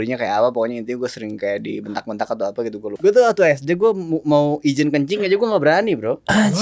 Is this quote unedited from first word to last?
no; 1 cut; at 2.9 s

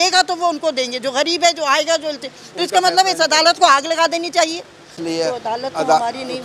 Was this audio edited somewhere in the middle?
yes; 1 cut; at 4.9 s

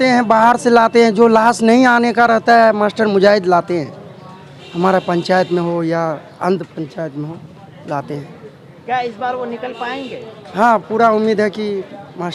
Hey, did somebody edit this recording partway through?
no; 0 cuts

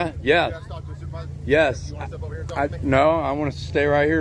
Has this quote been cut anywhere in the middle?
no; 0 cuts

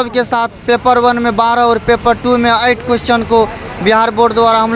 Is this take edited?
no; 0 cuts

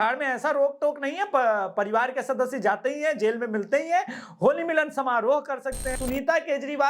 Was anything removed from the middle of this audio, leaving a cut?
yes; 1 cut; at 5.9 s

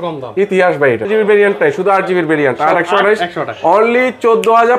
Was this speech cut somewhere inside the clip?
yes; 1 cut; at 1.1 s

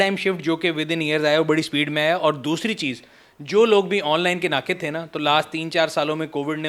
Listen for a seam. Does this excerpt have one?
no; 0 cuts

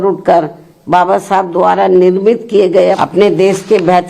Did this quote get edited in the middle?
yes; 1 cut; at 3.0 s

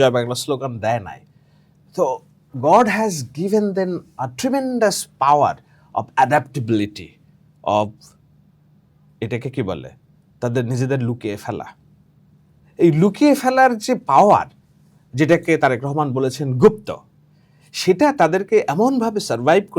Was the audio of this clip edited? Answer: no; 0 cuts

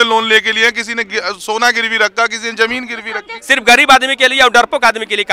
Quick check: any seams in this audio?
yes; 1 cut; at 3.4 s

